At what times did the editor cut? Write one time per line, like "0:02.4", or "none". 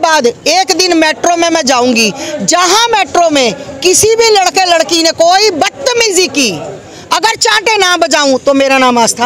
none